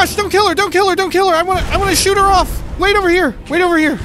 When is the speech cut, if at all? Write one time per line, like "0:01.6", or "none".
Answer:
0:02.8